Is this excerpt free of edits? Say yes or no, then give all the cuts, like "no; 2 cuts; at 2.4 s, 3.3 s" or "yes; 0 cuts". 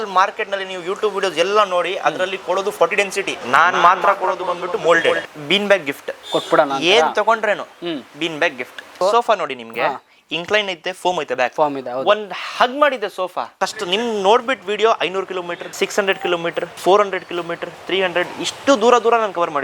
no; 5 cuts; at 5.2 s, 9.0 s, 13.5 s, 15.6 s, 16.7 s